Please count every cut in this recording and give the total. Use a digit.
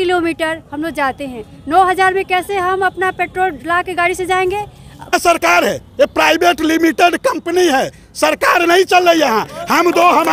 1